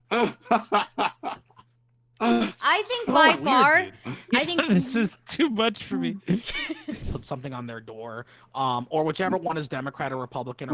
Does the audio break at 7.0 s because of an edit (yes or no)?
yes